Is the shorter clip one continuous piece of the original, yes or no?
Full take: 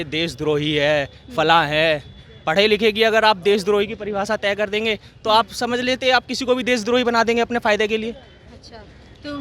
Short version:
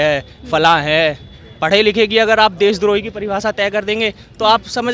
yes